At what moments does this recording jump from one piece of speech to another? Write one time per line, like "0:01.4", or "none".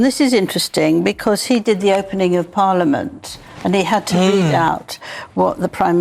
none